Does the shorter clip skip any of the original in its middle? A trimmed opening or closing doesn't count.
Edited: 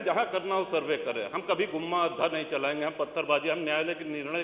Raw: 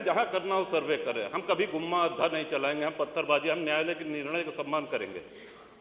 no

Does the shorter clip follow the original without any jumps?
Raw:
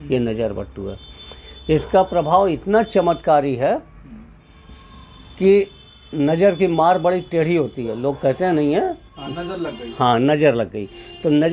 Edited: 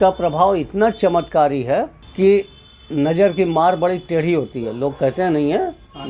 no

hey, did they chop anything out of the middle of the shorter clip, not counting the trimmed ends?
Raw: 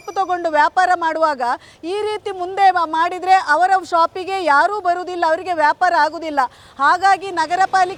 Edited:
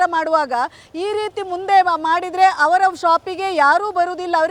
no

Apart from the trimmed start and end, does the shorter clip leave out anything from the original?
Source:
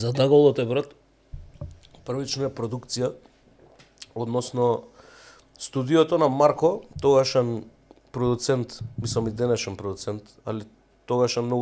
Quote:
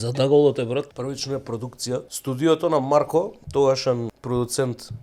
yes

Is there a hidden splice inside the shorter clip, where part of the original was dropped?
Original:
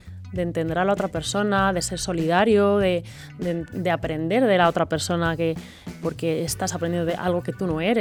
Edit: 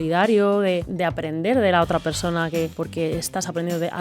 yes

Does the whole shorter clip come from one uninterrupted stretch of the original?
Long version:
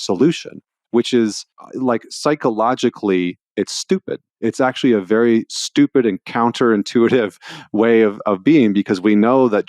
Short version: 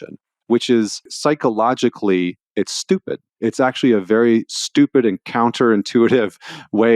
no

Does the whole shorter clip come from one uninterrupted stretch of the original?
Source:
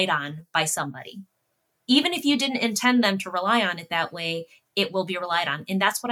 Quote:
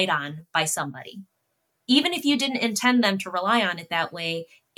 yes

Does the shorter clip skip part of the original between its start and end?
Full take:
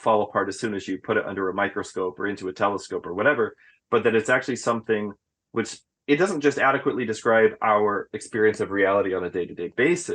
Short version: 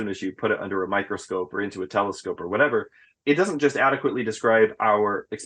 yes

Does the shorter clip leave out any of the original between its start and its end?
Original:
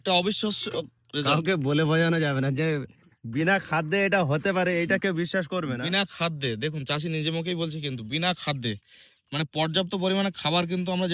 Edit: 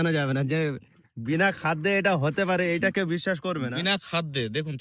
no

